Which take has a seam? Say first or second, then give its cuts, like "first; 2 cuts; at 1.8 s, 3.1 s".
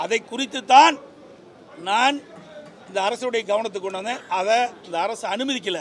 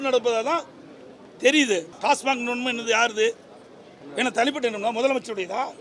second; 1 cut; at 1.9 s